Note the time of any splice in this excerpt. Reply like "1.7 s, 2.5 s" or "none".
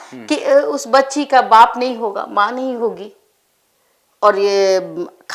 none